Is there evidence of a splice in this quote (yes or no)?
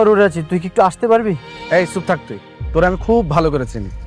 yes